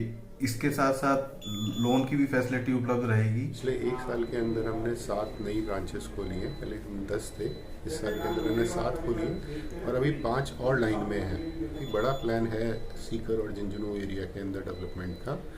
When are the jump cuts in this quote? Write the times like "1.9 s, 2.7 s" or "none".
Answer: 3.5 s, 11.8 s